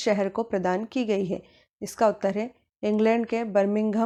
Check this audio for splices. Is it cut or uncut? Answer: uncut